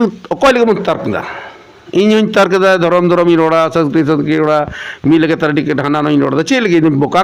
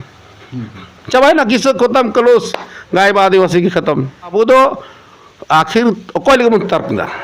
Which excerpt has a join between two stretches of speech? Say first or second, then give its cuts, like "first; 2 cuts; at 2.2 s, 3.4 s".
second; 1 cut; at 4.3 s